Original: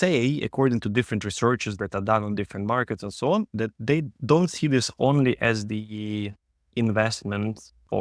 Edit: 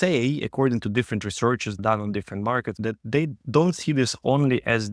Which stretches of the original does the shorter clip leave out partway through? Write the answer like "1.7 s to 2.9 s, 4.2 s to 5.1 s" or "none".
1.8 s to 2.0 s, 3.0 s to 3.5 s